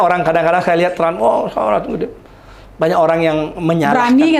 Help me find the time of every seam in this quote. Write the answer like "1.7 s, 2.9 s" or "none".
none